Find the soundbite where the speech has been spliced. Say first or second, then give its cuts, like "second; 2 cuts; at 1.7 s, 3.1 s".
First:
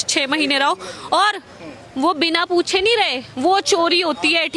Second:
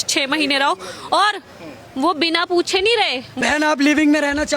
second; 1 cut; at 3.2 s